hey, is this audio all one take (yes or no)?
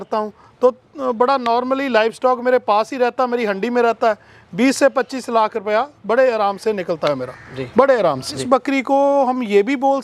no